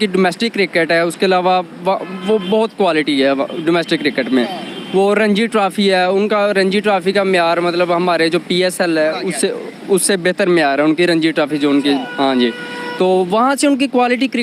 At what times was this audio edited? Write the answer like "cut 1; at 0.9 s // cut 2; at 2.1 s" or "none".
none